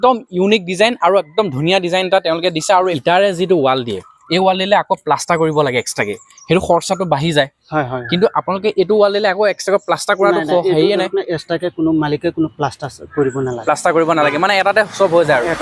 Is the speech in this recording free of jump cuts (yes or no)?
yes